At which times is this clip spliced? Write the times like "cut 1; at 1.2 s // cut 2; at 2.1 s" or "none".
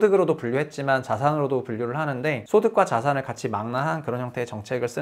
cut 1; at 2.4 s